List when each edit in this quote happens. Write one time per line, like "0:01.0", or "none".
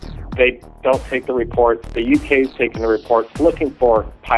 0:03.3